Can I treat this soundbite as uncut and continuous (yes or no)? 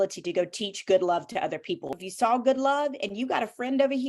no